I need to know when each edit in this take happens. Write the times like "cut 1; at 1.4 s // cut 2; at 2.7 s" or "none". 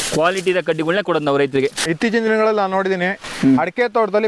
cut 1; at 1.8 s